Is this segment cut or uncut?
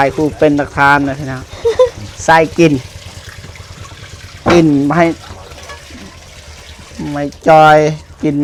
uncut